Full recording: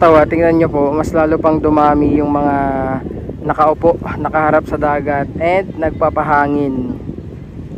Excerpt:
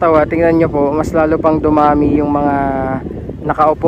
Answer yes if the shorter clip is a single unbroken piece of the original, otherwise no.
yes